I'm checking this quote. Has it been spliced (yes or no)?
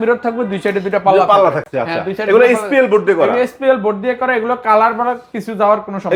no